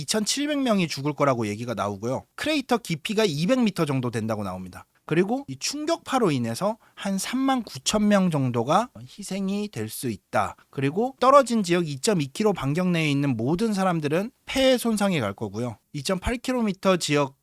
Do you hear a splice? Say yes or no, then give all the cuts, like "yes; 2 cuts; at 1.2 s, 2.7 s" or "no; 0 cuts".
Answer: yes; 1 cut; at 4.9 s